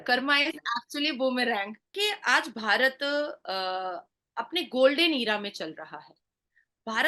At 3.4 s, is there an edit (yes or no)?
no